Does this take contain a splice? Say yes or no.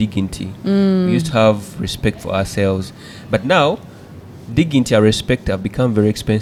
no